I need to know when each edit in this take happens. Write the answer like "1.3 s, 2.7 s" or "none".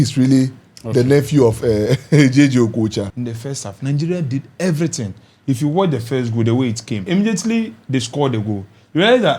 3.1 s, 7.1 s